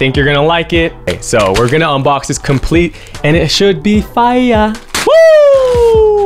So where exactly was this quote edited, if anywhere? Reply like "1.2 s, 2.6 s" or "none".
1.2 s, 4.9 s